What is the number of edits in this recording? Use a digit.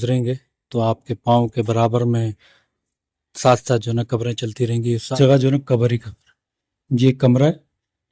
1